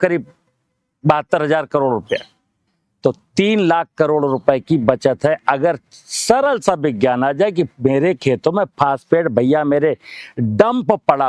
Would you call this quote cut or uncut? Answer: uncut